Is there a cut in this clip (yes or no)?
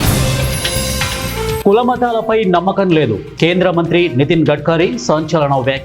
yes